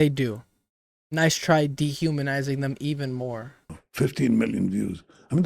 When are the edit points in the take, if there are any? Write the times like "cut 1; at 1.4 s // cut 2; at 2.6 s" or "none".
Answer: cut 1; at 3.8 s

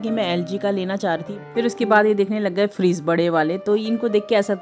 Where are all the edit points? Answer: cut 1; at 1.3 s

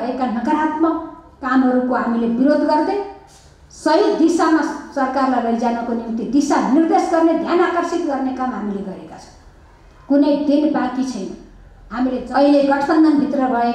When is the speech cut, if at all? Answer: cut 1; at 12.2 s

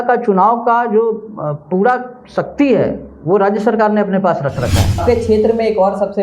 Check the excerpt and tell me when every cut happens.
cut 1; at 5.0 s

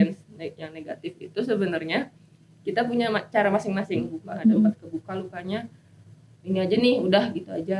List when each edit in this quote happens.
cut 1; at 4.2 s

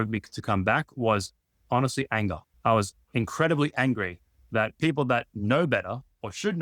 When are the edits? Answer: cut 1; at 2.5 s

